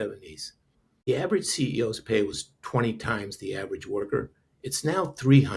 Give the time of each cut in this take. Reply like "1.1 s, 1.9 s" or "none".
1.1 s

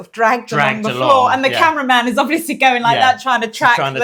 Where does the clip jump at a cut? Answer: none

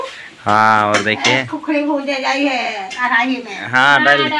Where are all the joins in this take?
3.0 s

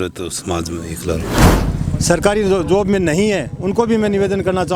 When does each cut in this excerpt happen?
1.4 s

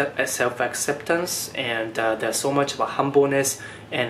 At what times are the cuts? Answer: none

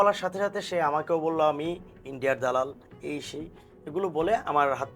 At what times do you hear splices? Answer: none

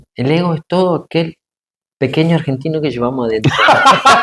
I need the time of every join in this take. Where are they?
none

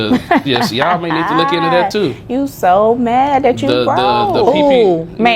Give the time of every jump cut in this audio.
none

